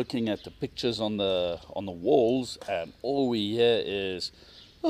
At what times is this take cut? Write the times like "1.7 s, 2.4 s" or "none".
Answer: none